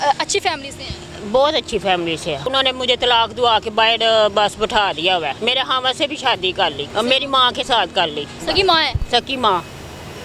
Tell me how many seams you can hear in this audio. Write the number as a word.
four